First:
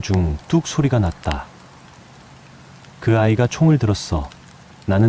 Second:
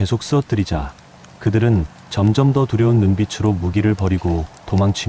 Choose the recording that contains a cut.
first; 2 cuts; at 1.6 s, 3.0 s

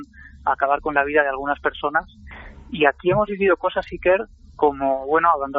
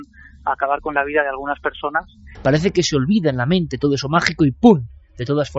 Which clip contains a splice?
second; 1 cut; at 2.2 s

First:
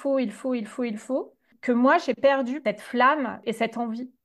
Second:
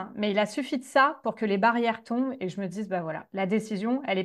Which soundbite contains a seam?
first; 3 cuts; at 1.5 s, 2.6 s, 3.4 s

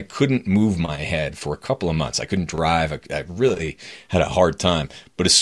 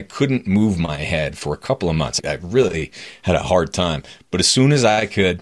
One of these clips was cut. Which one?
second; 1 cut; at 2.2 s

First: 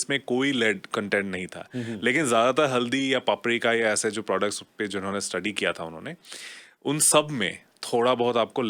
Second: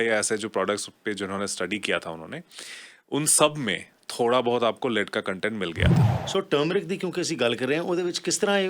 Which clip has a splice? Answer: second; 1 cut; at 6.0 s

